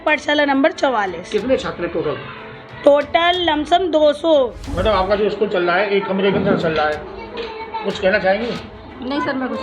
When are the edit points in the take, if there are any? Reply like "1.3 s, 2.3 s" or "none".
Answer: 4.6 s

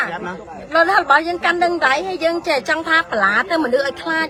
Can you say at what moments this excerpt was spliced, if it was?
none

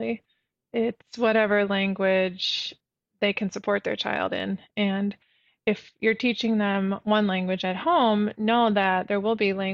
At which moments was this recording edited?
none

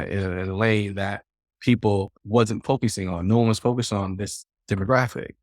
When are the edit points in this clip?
2.2 s

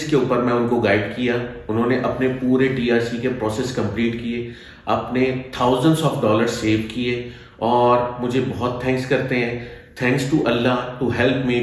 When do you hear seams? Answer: none

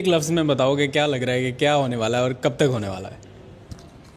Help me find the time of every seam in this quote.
none

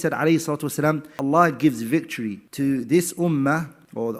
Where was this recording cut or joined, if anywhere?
1.1 s

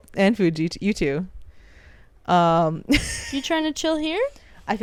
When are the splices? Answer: none

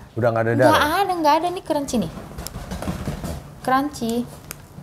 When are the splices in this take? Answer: none

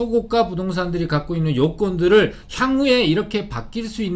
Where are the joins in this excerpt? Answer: none

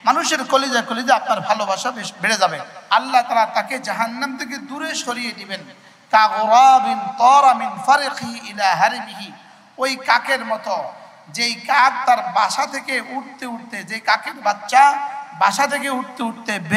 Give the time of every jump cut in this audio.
2.7 s

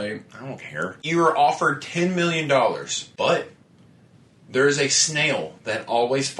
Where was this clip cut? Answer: 1.0 s, 3.0 s

